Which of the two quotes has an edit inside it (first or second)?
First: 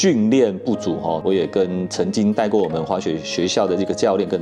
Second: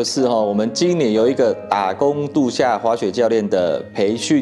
first